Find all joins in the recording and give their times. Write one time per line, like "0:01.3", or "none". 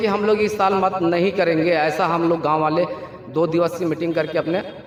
none